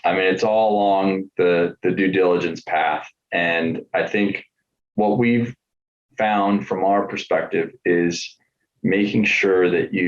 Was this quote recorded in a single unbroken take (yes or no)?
yes